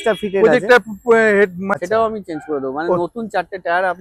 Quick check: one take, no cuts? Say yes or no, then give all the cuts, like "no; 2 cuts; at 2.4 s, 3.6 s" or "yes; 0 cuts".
no; 1 cut; at 1.7 s